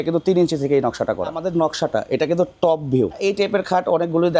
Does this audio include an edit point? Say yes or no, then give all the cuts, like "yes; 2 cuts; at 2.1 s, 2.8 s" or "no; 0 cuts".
yes; 2 cuts; at 1.4 s, 3.2 s